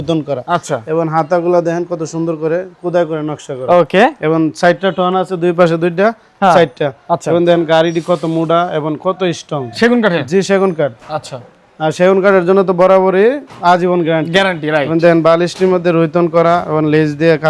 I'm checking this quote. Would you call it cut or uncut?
uncut